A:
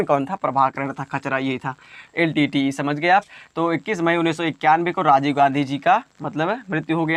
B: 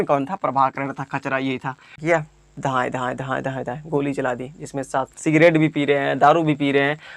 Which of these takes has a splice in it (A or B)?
B